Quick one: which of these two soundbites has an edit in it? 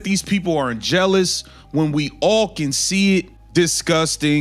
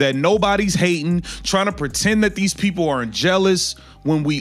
first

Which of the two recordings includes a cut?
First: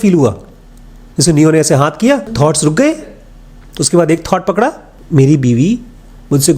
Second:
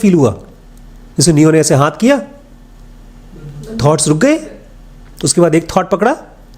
first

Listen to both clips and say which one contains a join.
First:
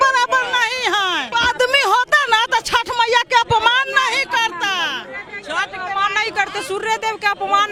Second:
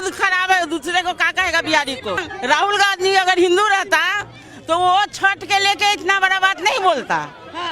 second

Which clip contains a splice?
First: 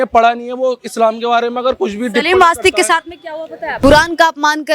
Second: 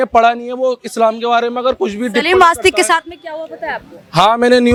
first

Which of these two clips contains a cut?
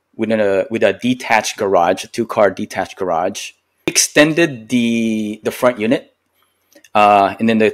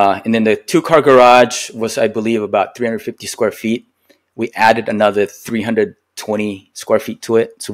first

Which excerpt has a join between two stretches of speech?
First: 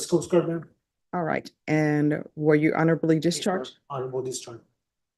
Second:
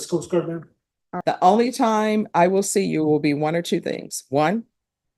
second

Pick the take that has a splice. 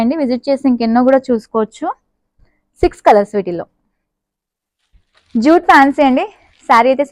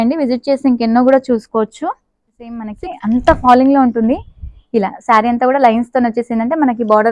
second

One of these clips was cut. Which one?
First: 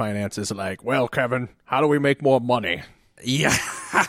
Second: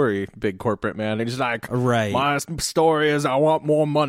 first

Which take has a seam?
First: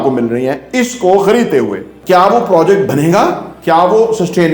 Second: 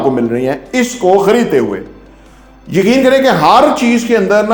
first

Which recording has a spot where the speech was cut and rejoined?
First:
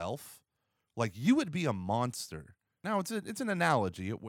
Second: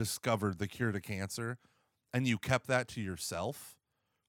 first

